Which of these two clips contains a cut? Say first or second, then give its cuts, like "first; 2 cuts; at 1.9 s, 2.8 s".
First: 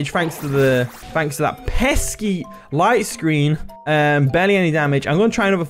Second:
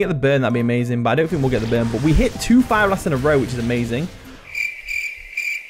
first; 2 cuts; at 1.0 s, 3.7 s